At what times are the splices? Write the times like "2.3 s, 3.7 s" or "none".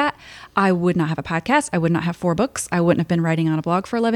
none